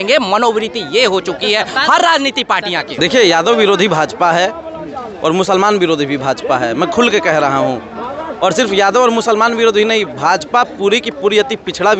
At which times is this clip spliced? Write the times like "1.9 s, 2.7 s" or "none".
2.9 s